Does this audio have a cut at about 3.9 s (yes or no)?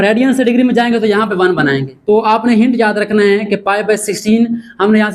no